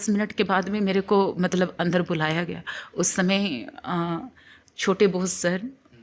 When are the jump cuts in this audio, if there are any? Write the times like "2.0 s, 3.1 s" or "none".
none